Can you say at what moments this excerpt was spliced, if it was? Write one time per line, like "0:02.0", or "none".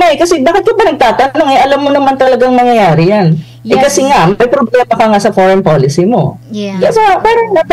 none